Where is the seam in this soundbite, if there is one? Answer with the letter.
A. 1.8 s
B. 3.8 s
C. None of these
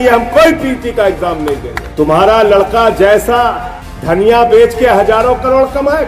A